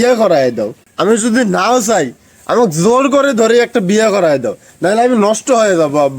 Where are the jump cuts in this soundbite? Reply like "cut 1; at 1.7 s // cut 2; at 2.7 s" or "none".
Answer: none